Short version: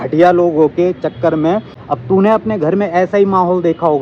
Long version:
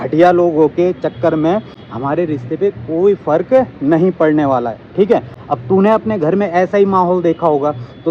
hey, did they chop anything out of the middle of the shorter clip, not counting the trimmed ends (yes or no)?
yes